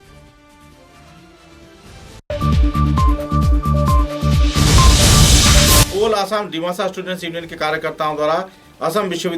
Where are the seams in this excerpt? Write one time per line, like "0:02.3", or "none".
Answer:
0:05.8